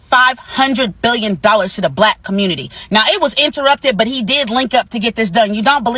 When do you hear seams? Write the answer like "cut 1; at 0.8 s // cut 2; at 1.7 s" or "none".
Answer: none